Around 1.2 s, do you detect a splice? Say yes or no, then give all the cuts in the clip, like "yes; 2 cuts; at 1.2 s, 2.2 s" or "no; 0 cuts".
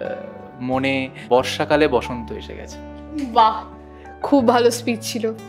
yes; 1 cut; at 1.2 s